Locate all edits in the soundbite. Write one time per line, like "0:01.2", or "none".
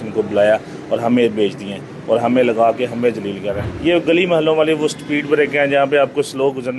0:03.6